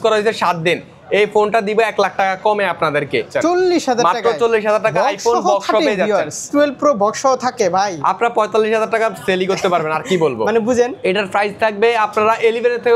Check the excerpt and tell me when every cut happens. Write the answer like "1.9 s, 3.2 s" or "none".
3.3 s, 6.5 s, 11.0 s